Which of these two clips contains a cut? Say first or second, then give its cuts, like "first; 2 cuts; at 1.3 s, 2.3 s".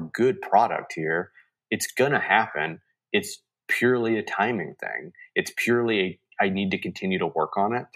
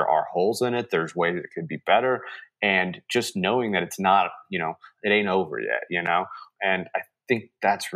second; 2 cuts; at 4.9 s, 6.5 s